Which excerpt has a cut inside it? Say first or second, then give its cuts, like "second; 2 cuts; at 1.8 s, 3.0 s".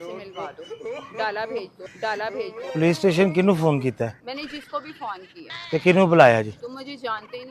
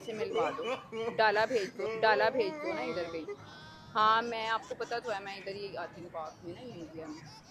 first; 1 cut; at 2.6 s